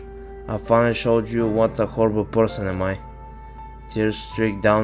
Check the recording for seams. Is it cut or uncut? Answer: uncut